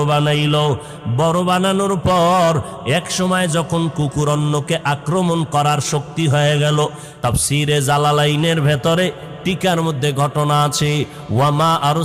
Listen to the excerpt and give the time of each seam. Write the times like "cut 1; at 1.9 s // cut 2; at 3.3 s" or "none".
cut 1; at 7.1 s